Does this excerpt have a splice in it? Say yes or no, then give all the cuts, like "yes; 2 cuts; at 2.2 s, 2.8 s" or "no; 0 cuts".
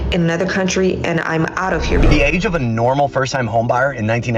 yes; 1 cut; at 2.1 s